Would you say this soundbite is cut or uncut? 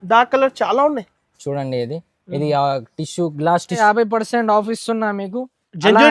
cut